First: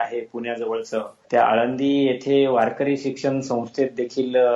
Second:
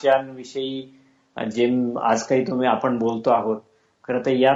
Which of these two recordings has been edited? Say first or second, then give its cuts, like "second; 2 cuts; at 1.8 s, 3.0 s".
first; 1 cut; at 1.2 s